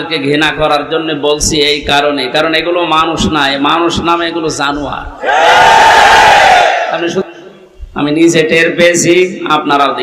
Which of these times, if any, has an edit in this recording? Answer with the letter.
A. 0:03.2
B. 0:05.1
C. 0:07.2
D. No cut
C